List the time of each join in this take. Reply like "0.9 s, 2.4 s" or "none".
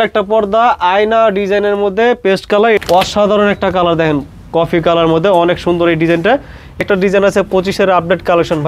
2.8 s, 6.8 s